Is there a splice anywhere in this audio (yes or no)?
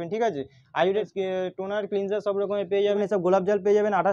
yes